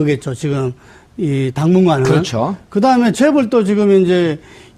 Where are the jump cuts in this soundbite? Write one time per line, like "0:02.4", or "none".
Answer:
0:01.7